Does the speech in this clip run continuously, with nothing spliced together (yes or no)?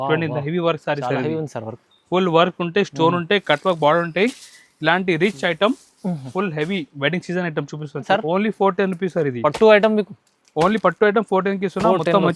no